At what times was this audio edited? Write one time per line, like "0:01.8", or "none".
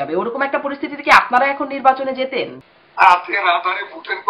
0:02.6